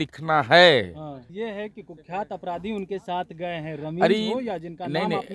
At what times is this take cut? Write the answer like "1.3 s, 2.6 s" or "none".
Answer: 1.3 s